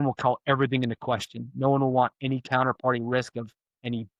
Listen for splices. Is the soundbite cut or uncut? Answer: uncut